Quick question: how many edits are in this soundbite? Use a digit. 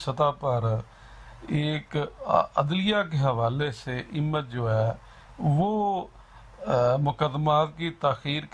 0